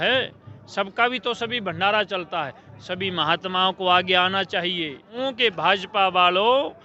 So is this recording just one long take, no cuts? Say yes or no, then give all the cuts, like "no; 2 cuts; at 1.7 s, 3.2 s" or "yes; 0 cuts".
no; 1 cut; at 5.1 s